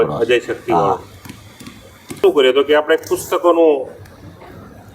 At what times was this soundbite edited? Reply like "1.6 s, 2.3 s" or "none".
2.2 s